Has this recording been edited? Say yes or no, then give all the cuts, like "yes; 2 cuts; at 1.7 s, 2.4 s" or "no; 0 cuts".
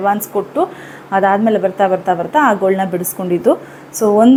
no; 0 cuts